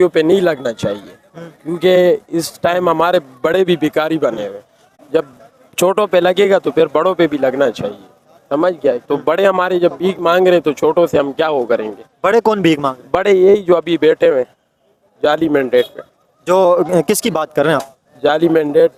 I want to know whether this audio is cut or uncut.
uncut